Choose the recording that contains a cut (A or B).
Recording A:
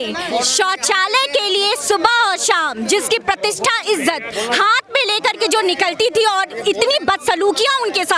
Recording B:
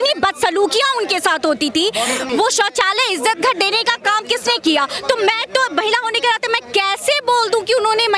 B